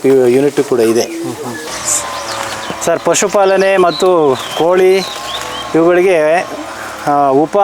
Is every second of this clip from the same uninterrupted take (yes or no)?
no